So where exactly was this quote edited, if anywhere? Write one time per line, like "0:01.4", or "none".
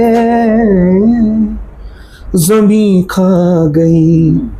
none

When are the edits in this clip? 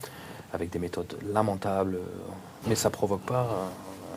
0:02.6

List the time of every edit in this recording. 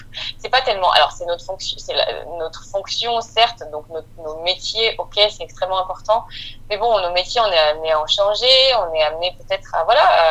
none

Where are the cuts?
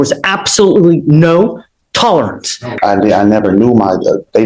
0:02.7

